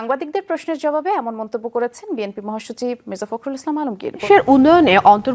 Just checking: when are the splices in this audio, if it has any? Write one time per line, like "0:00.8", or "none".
0:04.2